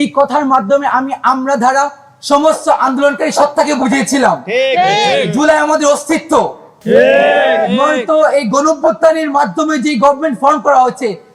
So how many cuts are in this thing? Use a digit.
1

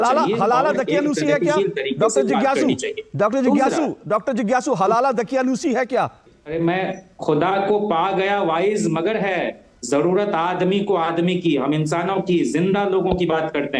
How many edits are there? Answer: 1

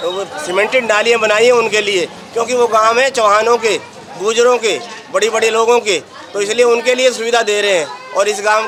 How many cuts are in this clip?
0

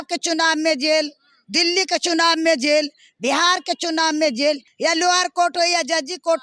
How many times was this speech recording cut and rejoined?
1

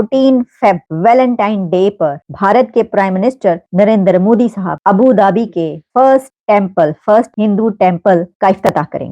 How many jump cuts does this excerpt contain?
8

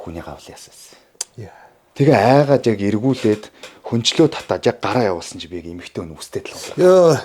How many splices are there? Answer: 1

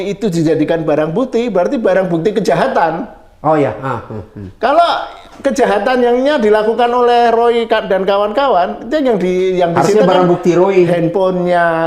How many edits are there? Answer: 0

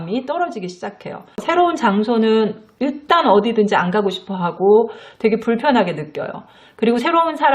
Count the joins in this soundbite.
1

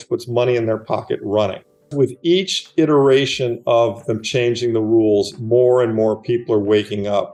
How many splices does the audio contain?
0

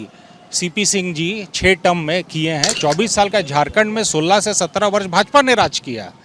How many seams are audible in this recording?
1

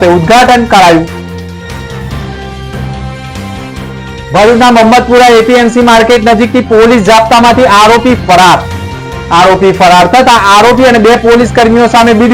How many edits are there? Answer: 0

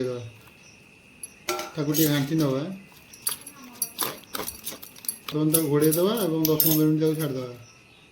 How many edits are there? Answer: 1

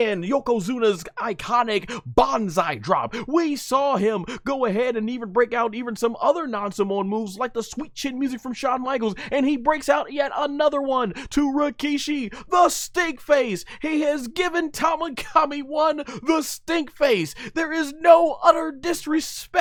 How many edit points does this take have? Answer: 0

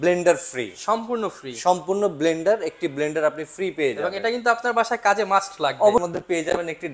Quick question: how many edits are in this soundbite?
1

